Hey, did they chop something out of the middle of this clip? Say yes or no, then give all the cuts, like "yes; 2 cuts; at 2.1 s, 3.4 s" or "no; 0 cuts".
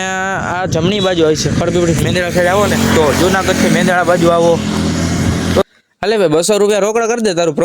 yes; 1 cut; at 5.6 s